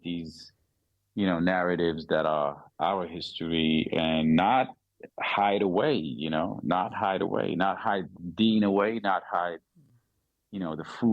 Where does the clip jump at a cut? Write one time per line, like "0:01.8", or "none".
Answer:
none